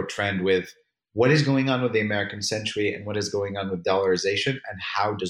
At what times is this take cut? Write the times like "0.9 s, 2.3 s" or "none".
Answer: none